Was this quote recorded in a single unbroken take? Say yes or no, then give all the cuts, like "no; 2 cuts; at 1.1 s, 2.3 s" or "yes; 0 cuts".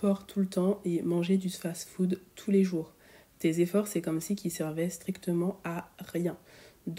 yes; 0 cuts